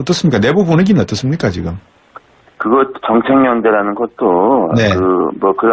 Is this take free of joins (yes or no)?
yes